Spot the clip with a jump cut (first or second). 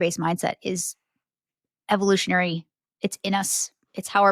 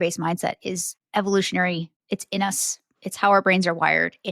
second